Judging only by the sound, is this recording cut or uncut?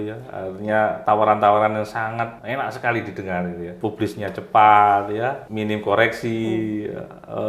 cut